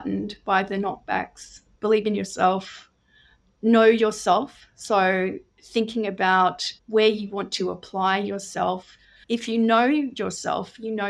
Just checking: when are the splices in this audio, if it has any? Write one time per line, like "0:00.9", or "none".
none